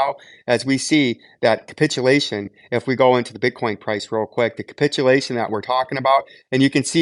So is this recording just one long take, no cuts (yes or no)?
yes